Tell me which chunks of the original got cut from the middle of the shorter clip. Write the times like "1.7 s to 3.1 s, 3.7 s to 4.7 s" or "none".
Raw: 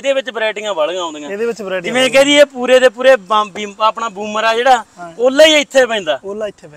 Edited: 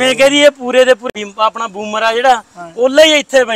3.0 s to 3.5 s